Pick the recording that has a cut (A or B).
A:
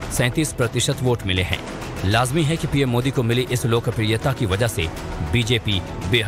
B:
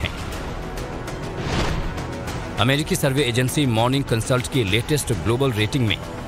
A